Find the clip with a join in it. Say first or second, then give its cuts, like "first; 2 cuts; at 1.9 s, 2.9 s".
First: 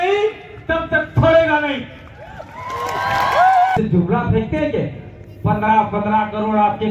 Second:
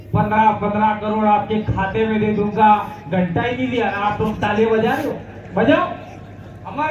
first; 1 cut; at 3.8 s